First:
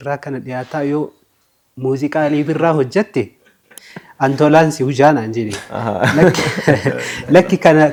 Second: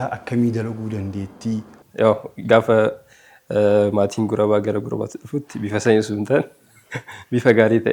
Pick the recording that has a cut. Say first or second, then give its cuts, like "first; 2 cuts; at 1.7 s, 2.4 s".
second; 1 cut; at 1.8 s